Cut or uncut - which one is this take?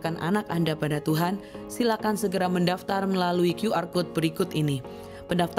uncut